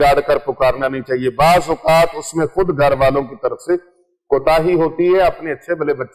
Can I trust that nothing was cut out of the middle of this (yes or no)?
yes